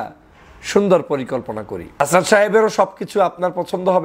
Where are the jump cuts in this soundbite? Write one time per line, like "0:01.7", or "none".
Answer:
0:02.0

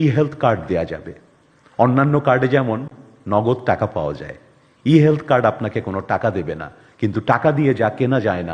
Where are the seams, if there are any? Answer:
none

